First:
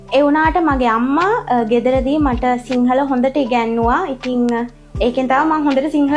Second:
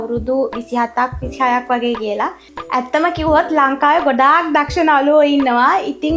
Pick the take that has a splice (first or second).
second